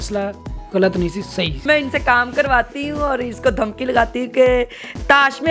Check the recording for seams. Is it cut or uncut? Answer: cut